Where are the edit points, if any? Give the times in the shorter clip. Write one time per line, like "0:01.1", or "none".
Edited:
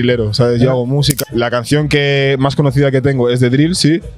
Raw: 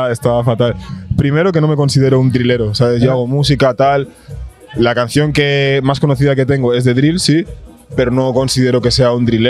0:01.1